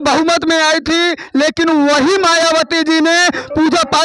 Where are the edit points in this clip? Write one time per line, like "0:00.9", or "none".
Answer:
none